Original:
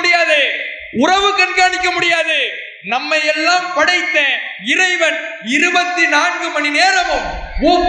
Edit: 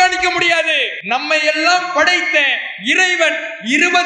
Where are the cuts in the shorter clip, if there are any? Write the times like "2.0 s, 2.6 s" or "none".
0.9 s